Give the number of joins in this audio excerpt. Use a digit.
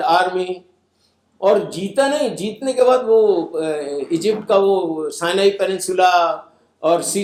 0